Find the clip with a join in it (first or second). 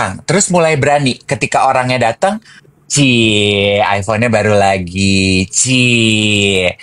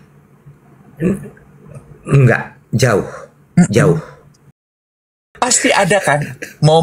second